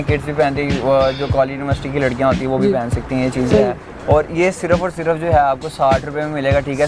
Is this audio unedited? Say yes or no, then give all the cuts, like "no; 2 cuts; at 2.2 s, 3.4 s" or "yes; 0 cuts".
yes; 0 cuts